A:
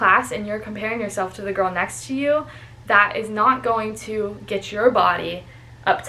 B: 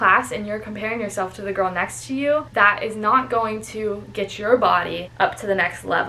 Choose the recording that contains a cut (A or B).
B